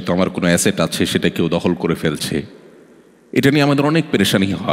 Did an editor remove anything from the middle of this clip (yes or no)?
no